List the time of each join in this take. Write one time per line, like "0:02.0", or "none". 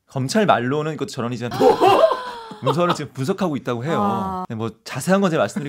0:01.4
0:04.4